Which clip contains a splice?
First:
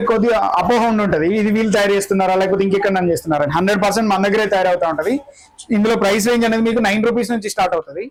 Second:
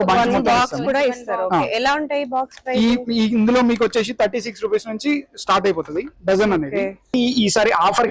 second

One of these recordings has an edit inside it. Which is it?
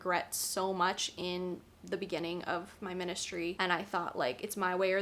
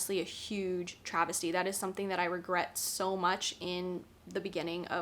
first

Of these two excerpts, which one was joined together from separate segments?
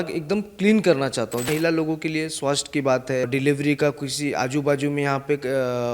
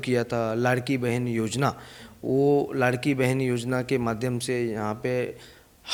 first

